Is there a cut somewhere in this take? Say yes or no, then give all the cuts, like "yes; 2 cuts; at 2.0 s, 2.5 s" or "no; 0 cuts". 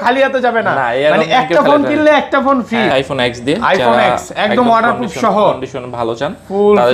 yes; 1 cut; at 2.9 s